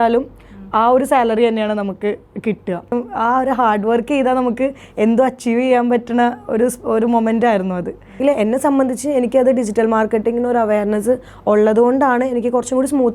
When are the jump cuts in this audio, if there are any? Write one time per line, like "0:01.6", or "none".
0:02.9
0:08.2